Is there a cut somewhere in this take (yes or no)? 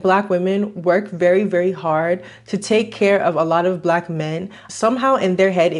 yes